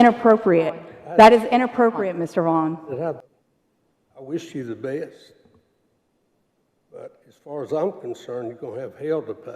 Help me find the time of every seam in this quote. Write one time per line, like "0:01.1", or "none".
0:03.3

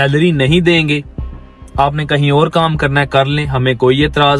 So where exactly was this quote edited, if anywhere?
none

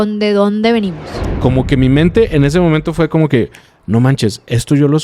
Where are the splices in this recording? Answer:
0:01.2

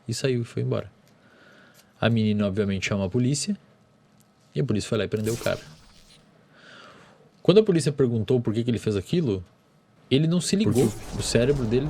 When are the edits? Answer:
0:10.9

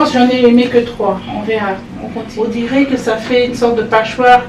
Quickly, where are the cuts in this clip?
0:02.2

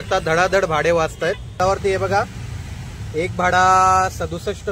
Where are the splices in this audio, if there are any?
0:01.6

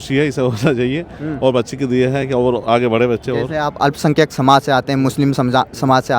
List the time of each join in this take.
none

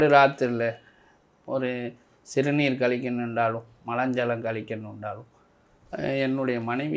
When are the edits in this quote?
none

